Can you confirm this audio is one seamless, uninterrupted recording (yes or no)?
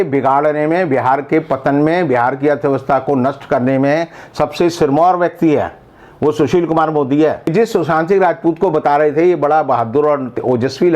no